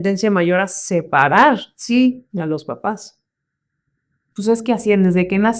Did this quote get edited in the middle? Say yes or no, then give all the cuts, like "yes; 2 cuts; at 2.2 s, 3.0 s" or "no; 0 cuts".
no; 0 cuts